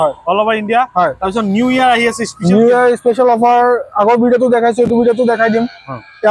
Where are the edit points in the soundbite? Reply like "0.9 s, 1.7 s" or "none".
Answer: none